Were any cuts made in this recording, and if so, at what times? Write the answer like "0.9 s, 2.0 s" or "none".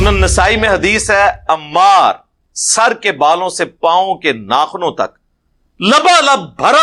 none

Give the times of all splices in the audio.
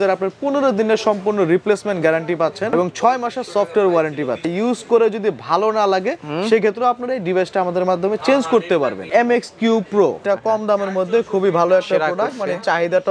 2.7 s, 4.5 s, 9.0 s, 10.2 s

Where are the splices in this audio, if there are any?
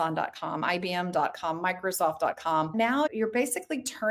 2.7 s

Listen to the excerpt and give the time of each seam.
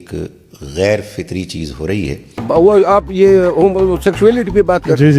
2.3 s

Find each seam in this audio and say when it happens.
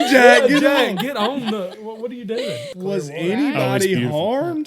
2.7 s

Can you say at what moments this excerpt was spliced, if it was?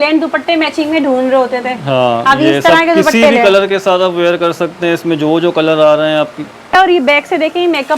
6.7 s

